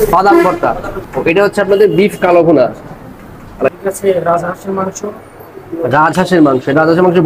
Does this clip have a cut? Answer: yes; 2 cuts; at 0.9 s, 3.7 s

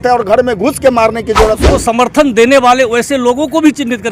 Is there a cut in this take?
yes; 1 cut; at 1.6 s

